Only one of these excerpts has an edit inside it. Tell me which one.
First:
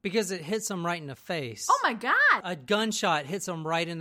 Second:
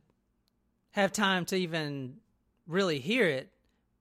first; 1 cut; at 2.4 s

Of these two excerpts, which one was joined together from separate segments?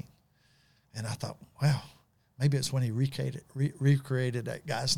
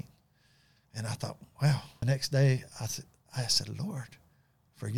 second; 1 cut; at 2.0 s

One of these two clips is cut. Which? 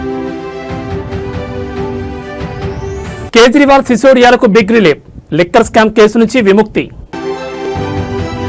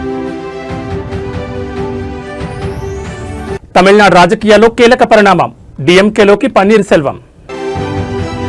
second; 1 cut; at 3.2 s

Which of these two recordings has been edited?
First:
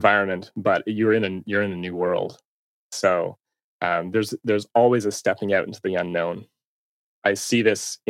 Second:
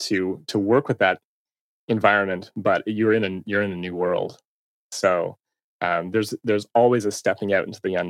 first; 1 cut; at 7.1 s

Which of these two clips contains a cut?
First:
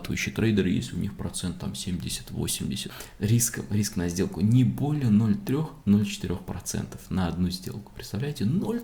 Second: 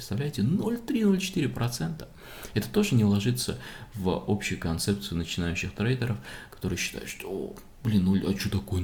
first; 1 cut; at 2.9 s

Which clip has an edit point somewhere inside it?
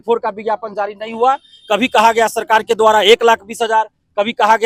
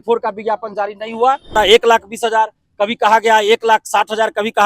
second; 1 cut; at 1.6 s

